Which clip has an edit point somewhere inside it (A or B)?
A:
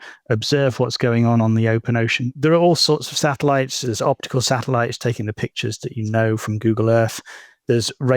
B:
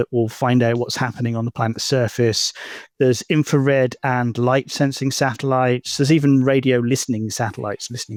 A